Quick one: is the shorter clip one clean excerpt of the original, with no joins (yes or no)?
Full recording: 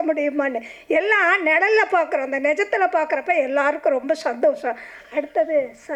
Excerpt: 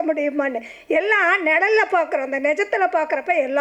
yes